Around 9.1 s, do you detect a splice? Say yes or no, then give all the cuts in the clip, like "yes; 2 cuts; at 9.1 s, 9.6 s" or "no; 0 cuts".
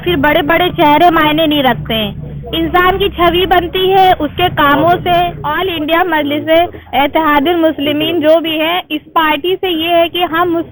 no; 1 cut; at 5.4 s